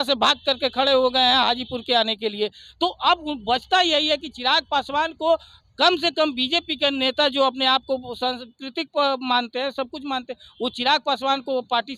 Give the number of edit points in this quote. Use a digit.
0